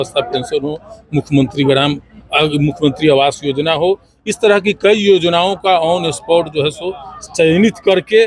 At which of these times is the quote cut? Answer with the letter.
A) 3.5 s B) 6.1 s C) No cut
C